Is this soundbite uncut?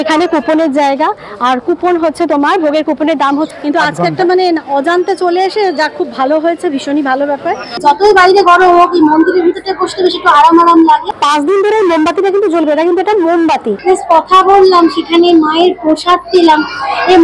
no; 4 cuts; at 3.5 s, 7.8 s, 11.1 s, 13.7 s

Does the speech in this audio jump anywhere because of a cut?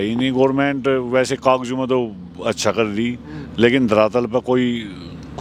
no; 0 cuts

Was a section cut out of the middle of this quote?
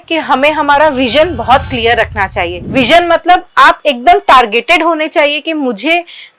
no; 0 cuts

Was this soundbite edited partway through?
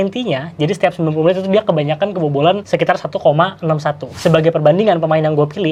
no; 0 cuts

